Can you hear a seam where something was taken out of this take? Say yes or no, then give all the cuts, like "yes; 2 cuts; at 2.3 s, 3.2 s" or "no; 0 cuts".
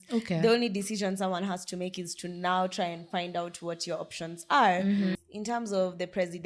yes; 1 cut; at 5.2 s